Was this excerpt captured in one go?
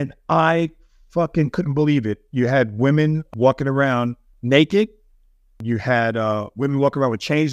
no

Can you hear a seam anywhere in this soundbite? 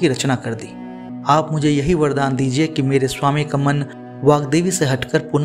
yes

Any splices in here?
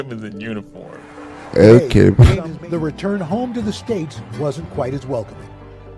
yes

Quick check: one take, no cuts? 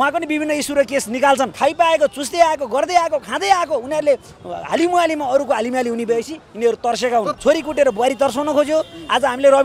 no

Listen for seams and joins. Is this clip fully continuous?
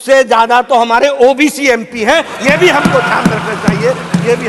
yes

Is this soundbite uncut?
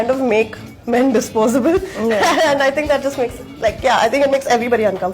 yes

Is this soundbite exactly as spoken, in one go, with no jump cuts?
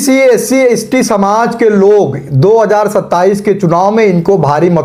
yes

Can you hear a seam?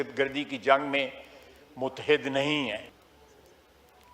yes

